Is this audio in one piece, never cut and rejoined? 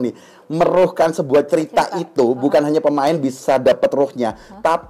yes; 0 cuts

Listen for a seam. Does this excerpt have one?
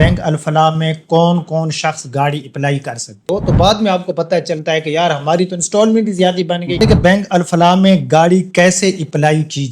yes; 2 cuts; at 3.3 s, 6.8 s

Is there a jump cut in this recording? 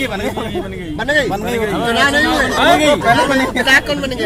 no; 0 cuts

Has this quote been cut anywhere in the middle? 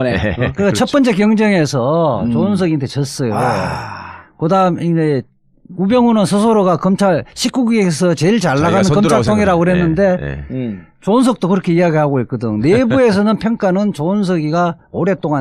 no; 0 cuts

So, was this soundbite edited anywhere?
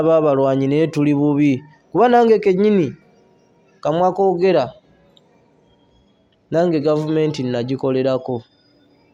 no; 0 cuts

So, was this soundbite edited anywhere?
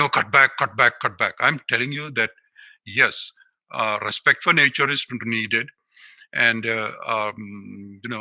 no; 0 cuts

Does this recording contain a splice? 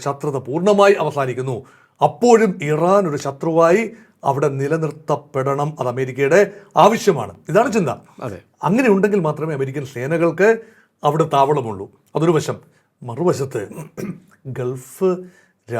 no; 0 cuts

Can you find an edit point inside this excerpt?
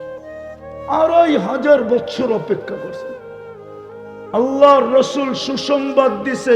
yes; 2 cuts; at 2.8 s, 4.3 s

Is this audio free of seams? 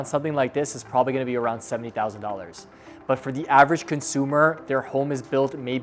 yes; 0 cuts

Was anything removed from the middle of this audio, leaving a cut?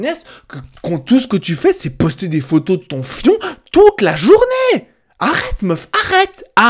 no; 0 cuts

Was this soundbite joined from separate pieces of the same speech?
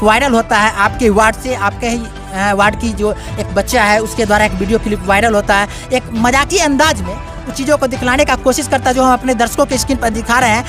no; 0 cuts

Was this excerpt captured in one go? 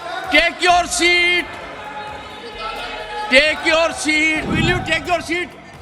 no; 1 cut; at 4.5 s

